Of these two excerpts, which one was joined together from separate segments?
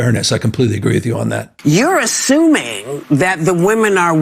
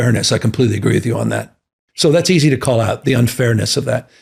first; 1 cut; at 1.5 s

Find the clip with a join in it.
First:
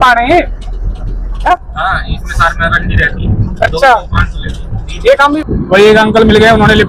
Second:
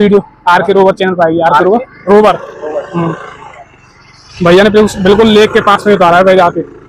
first; 2 cuts; at 1.5 s, 5.4 s

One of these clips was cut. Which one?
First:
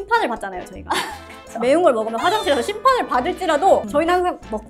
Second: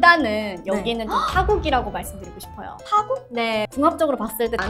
second; 1 cut; at 3.7 s

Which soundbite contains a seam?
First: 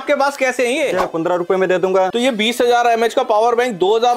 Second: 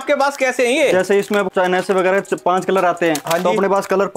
first; 2 cuts; at 1.0 s, 2.1 s

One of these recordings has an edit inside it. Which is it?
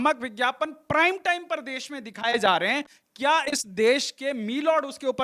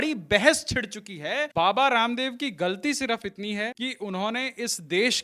second; 2 cuts; at 1.5 s, 3.7 s

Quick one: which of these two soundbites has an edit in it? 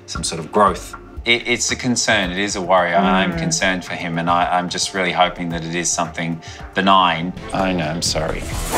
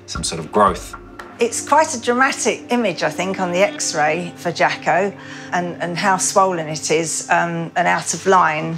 first; 2 cuts; at 1.2 s, 7.4 s

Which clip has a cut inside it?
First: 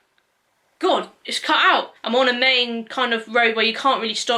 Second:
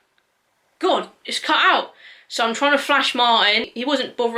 first; 1 cut; at 2.0 s

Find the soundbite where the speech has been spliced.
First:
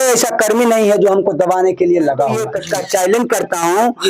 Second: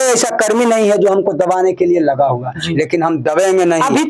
first; 1 cut; at 2.5 s

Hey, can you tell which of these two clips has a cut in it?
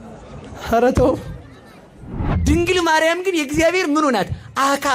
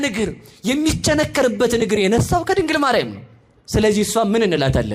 first; 1 cut; at 2.2 s

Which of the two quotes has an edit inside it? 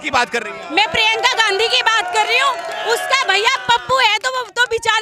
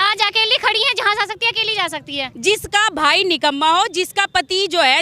second; 1 cut; at 2.3 s

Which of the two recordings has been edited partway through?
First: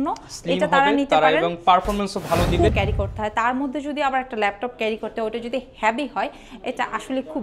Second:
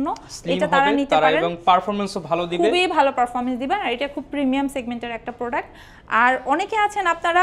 first; 1 cut; at 2.7 s

